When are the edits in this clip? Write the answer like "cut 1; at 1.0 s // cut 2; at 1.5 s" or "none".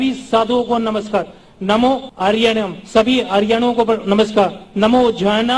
cut 1; at 2.1 s